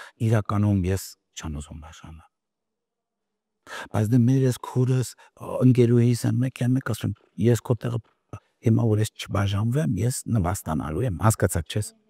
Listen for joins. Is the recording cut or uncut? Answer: uncut